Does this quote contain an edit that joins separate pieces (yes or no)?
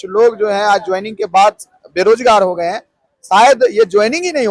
no